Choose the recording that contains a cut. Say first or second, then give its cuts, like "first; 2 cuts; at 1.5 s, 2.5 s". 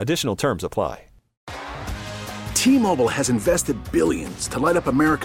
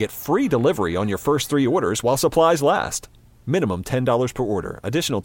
first; 1 cut; at 1.5 s